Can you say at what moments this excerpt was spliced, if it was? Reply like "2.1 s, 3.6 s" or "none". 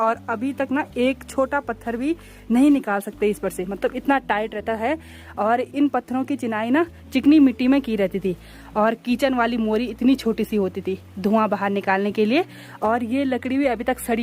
none